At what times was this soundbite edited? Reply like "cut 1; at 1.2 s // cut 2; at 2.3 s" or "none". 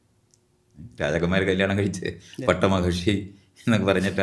none